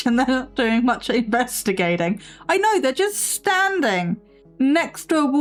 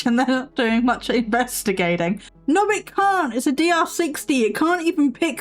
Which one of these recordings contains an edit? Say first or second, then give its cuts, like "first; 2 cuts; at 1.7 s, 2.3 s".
second; 1 cut; at 2.3 s